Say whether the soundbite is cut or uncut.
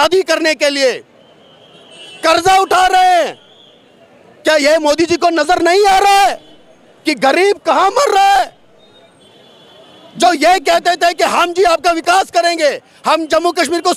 uncut